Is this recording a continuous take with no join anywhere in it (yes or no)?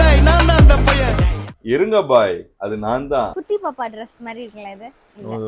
no